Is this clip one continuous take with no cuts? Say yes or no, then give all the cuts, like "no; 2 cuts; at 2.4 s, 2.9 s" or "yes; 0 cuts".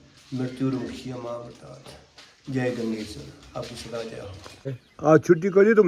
no; 1 cut; at 4.8 s